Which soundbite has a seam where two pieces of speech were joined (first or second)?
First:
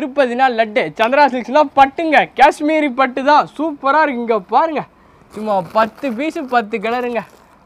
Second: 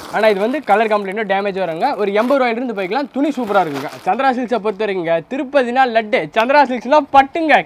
second